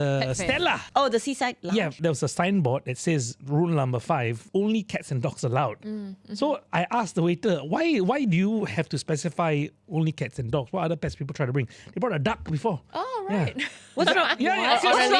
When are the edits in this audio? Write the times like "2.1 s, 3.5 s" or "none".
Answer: 0.8 s, 2.0 s, 4.4 s

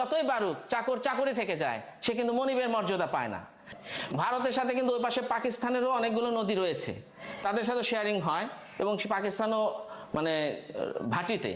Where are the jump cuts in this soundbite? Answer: 3.8 s

